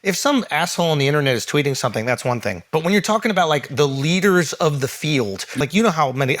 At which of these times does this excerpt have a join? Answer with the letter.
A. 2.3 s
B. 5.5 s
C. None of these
B